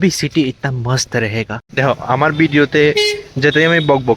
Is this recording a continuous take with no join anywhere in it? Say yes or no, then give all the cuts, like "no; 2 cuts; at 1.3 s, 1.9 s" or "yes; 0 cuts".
no; 1 cut; at 1.6 s